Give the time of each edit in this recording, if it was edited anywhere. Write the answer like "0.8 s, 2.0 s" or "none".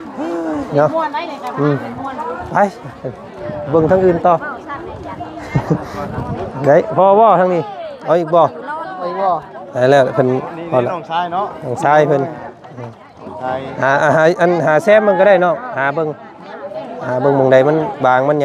none